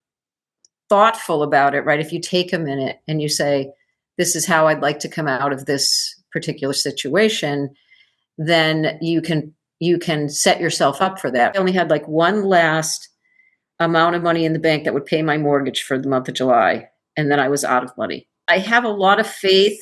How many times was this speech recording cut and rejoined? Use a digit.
2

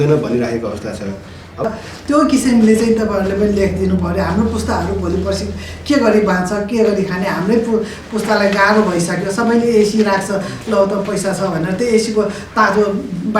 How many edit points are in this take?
1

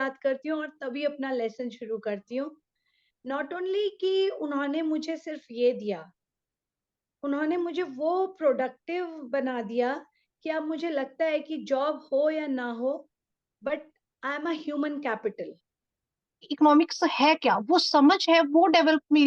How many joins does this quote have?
1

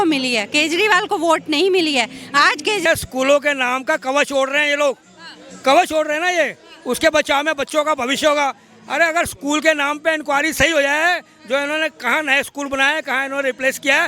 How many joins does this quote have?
1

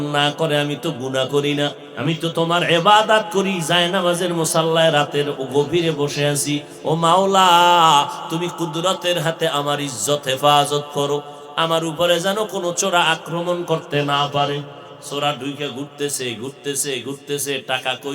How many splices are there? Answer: 1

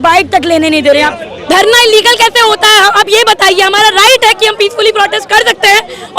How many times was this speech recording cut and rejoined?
1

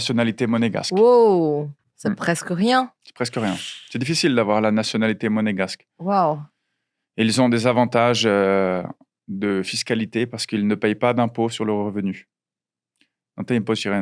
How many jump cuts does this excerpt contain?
0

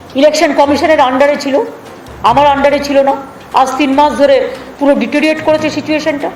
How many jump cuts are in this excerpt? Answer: 0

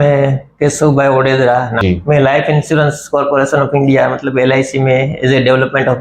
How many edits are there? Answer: 1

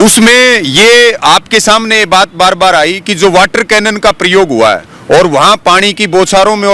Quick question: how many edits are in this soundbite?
1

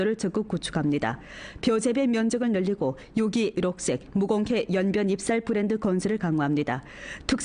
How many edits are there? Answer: 1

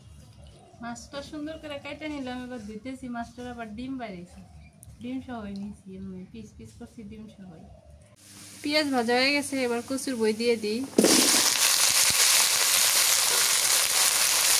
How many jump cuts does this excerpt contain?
1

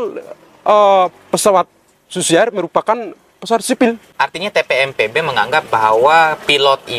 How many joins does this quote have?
1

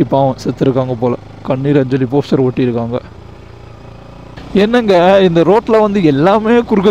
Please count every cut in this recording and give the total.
0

